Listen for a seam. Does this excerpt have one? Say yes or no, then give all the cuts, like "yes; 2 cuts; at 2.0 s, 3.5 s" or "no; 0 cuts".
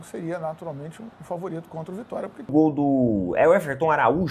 yes; 1 cut; at 2.5 s